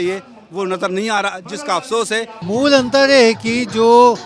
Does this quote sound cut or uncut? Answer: cut